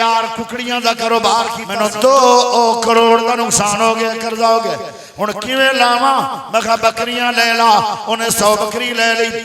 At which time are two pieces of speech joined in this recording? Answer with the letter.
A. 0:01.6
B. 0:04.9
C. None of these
A